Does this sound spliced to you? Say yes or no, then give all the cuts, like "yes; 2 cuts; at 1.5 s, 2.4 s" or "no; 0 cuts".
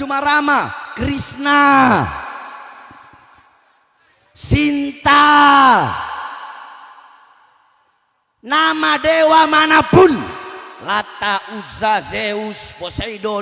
no; 0 cuts